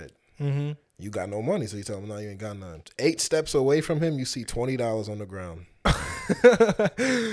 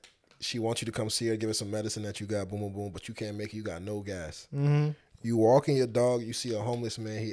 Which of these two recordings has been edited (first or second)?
first